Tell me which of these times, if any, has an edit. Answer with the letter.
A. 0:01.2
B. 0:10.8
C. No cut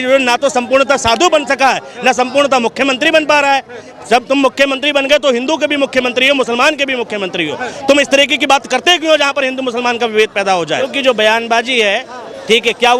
B